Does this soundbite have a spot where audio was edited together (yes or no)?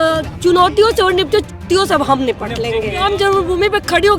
yes